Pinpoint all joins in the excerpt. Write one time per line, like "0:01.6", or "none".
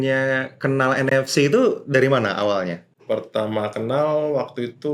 0:02.9